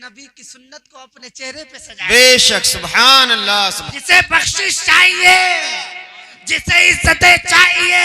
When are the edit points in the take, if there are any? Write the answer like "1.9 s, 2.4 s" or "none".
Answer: 3.9 s